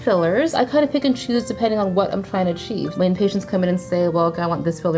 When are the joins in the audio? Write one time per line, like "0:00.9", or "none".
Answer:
0:02.9